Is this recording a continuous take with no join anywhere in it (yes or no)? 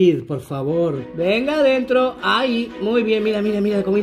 no